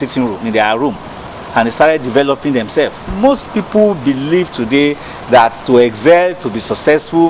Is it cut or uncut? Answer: cut